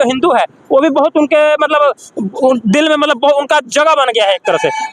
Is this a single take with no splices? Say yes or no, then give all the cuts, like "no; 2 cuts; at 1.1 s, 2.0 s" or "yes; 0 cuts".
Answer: yes; 0 cuts